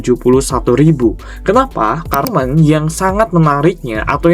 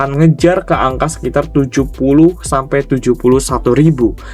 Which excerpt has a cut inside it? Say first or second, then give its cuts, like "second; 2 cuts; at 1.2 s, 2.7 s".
first; 1 cut; at 2.3 s